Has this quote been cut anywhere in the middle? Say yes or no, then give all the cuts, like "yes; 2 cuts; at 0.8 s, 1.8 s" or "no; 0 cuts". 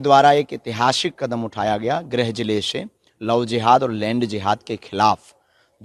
no; 0 cuts